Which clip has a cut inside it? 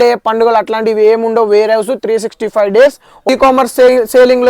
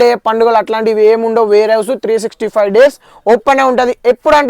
first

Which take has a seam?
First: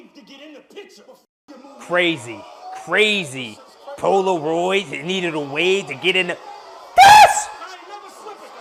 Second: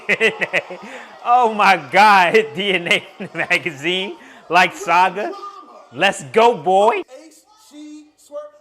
second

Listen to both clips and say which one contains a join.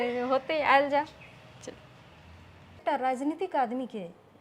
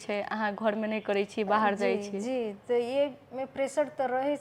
first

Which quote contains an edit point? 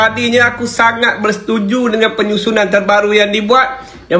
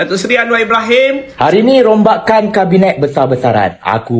second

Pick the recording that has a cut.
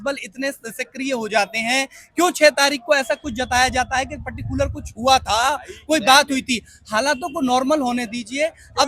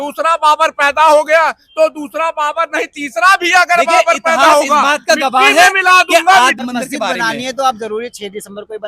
second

